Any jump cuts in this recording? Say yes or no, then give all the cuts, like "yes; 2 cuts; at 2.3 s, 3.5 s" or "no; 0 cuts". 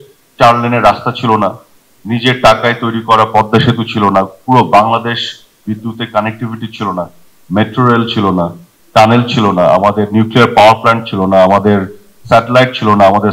no; 0 cuts